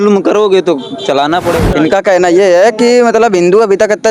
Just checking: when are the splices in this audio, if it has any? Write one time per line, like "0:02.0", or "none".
0:01.6